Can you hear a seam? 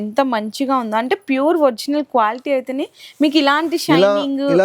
no; 0 cuts

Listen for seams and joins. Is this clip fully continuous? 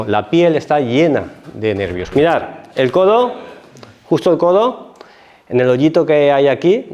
no; 1 cut; at 2.0 s

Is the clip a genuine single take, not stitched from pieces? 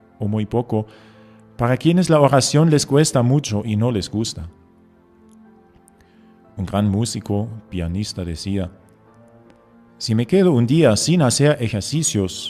no; 1 cut; at 2.1 s

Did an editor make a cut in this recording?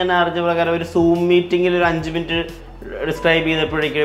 no; 0 cuts

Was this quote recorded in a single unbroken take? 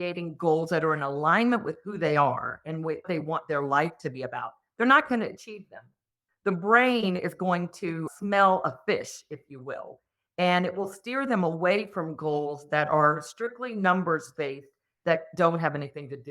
yes; 0 cuts

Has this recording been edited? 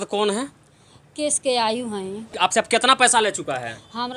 yes; 1 cut; at 2.2 s

